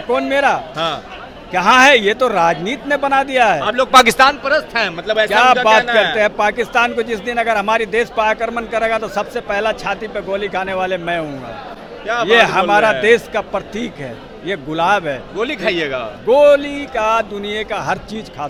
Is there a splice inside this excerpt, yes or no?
no